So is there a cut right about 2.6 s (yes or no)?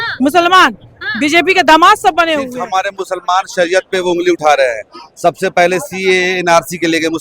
yes